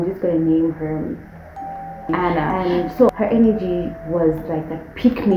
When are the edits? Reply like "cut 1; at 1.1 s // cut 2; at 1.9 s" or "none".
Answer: cut 1; at 3.1 s